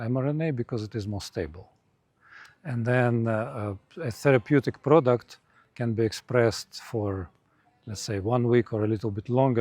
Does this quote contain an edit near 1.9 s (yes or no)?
no